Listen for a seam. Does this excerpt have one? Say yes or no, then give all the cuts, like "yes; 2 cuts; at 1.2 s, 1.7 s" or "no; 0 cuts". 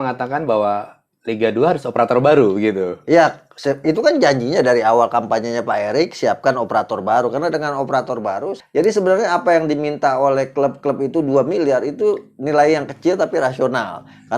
yes; 1 cut; at 8.5 s